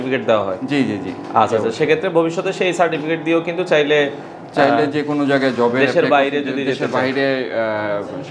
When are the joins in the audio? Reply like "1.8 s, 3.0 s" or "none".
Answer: none

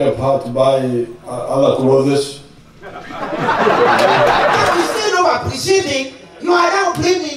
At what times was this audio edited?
1.2 s, 4.7 s

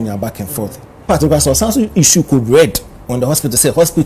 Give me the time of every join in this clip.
1.0 s

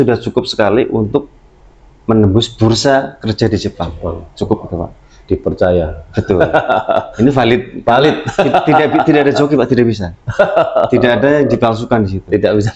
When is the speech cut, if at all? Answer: none

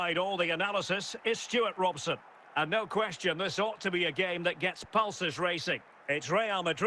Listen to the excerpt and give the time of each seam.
2.4 s, 5.9 s

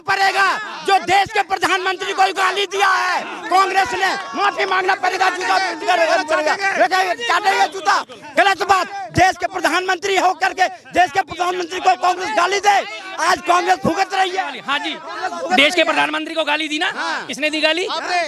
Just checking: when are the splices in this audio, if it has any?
none

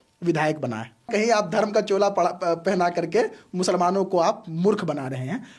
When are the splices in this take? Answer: 1.1 s

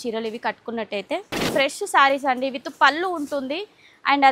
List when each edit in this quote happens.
1.5 s

